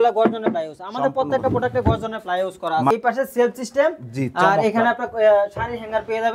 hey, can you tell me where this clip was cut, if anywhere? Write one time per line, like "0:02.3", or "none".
0:02.9